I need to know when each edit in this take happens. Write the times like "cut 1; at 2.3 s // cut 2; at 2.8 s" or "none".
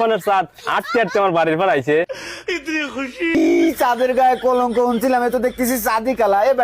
cut 1; at 3.3 s